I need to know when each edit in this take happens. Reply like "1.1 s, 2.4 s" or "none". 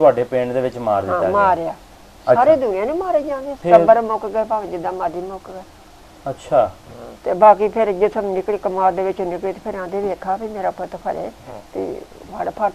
3.6 s